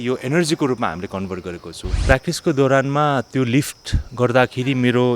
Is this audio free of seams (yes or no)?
no